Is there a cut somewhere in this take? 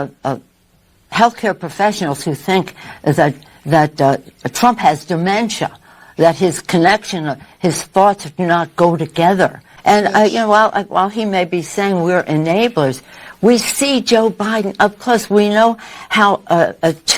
yes; 1 cut; at 9.7 s

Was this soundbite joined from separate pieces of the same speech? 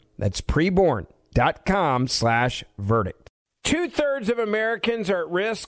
yes; 1 cut; at 3.2 s

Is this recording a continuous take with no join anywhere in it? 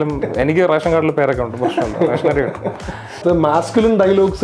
no; 1 cut; at 3.2 s

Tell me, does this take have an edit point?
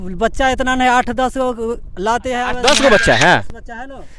yes; 1 cut; at 2.5 s

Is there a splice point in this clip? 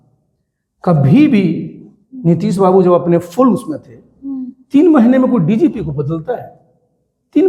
no; 0 cuts

